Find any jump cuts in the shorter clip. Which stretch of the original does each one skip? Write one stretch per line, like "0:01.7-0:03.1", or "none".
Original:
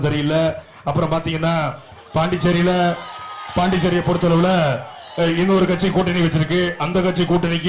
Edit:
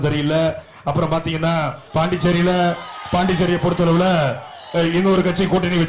0:01.8-0:02.0
0:03.1-0:03.4